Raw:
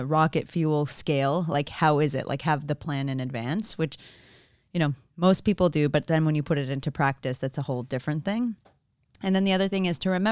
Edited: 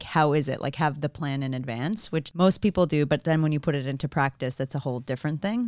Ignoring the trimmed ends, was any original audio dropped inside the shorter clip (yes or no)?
yes